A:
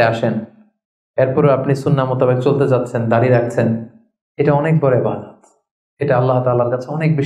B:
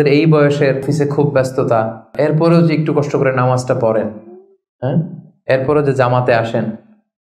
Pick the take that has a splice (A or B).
B